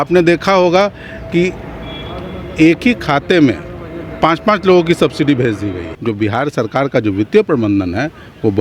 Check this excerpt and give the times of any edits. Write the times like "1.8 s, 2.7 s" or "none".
5.8 s